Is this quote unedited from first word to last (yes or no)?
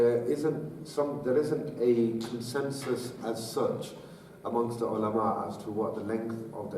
no